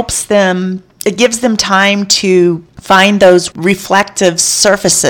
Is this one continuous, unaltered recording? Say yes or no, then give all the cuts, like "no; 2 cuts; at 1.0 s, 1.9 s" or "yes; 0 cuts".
no; 2 cuts; at 2.7 s, 3.5 s